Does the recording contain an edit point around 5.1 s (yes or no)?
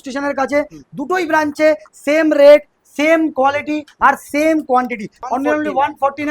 yes